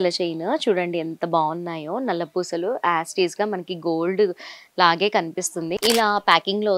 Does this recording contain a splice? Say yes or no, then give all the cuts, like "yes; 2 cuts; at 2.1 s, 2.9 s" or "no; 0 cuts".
yes; 1 cut; at 5.8 s